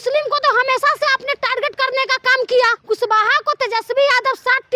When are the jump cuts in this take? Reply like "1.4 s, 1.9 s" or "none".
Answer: 2.8 s